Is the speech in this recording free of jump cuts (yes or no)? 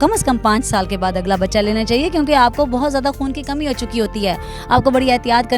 yes